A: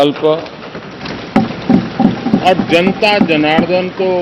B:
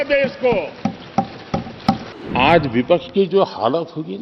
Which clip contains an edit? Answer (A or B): B